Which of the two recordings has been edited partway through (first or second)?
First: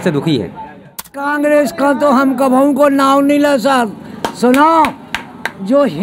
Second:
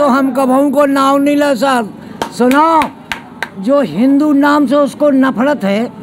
first